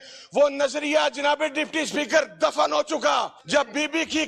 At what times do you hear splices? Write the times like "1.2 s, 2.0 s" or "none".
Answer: 3.4 s